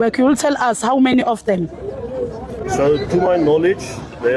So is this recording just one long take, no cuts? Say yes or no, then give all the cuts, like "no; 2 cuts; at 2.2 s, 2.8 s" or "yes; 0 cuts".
yes; 0 cuts